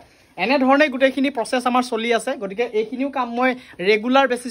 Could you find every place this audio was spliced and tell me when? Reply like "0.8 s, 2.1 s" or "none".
none